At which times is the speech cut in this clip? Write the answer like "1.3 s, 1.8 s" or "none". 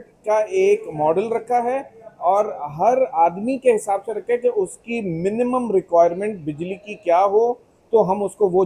none